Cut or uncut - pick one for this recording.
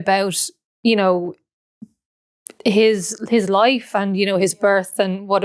uncut